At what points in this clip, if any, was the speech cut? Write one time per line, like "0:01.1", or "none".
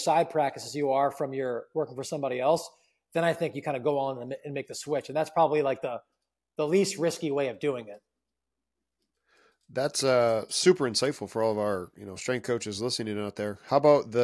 none

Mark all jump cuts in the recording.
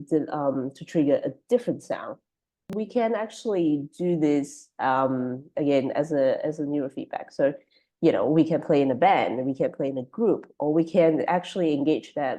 0:02.7

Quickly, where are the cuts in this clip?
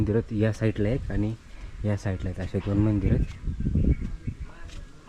none

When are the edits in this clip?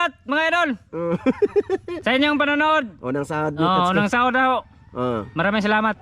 none

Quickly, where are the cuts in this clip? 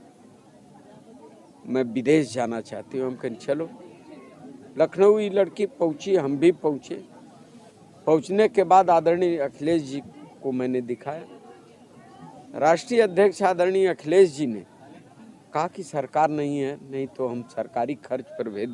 none

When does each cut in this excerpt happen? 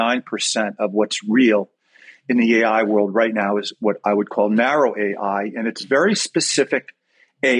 none

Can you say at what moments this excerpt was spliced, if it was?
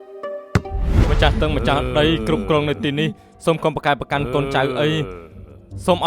0:00.9

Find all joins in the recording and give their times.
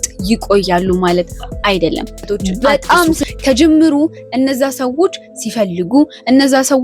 0:02.8

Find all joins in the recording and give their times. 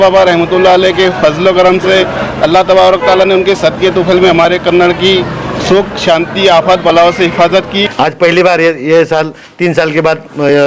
0:07.8

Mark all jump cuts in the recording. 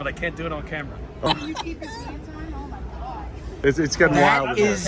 0:01.3
0:03.6

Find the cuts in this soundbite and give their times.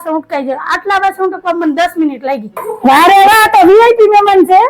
0:02.7

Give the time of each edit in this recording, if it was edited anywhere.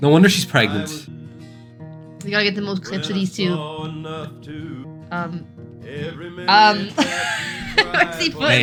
none

